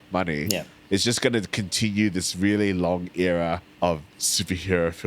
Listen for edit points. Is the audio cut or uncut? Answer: cut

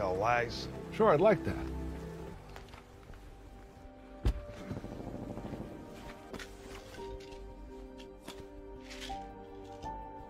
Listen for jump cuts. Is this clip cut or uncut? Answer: cut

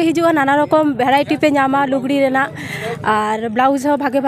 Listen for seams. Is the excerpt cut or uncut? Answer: uncut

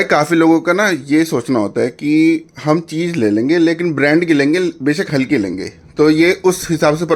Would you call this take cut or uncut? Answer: uncut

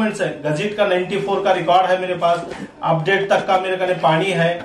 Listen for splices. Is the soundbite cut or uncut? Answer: uncut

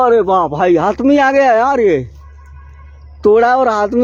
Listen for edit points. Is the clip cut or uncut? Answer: uncut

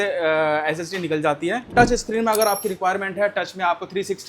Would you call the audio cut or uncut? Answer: cut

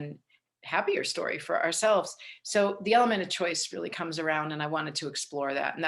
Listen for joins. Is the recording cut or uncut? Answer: cut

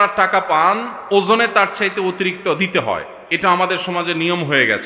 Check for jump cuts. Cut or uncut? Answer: uncut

